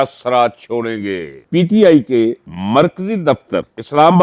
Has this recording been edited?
yes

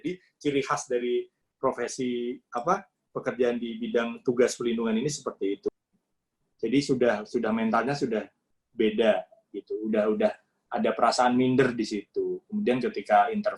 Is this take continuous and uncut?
no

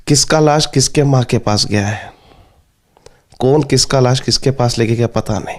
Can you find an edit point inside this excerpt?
no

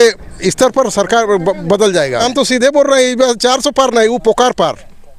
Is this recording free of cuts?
no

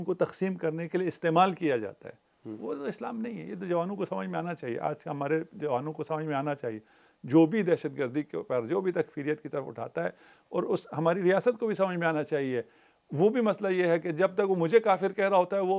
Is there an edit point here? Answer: no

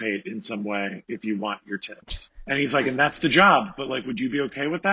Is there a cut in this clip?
yes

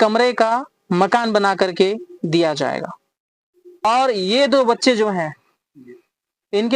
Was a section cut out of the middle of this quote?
yes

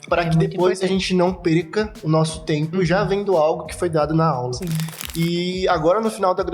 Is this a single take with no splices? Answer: no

